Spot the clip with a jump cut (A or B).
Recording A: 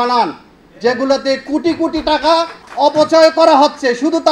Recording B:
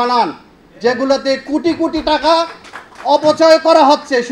A